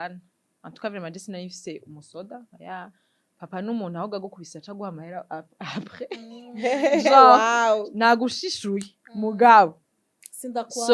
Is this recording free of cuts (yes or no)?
yes